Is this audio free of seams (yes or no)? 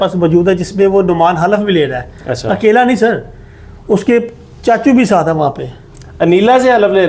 yes